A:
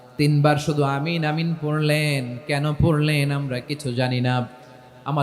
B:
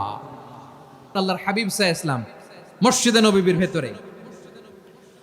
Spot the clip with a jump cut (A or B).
B